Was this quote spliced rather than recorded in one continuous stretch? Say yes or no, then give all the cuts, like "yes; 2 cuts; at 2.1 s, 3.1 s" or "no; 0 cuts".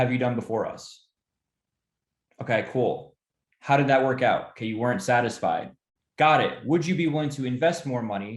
no; 0 cuts